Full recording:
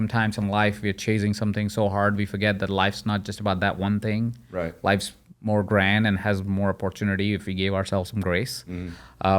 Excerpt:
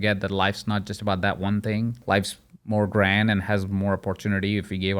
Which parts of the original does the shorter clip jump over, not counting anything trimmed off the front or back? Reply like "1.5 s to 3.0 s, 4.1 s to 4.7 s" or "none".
4.4 s to 4.7 s